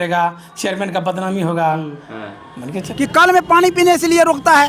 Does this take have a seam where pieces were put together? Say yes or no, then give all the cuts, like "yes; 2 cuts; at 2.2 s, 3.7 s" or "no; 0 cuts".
yes; 1 cut; at 2.7 s